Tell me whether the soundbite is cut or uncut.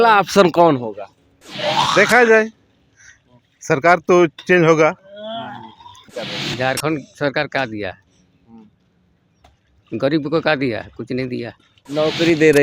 cut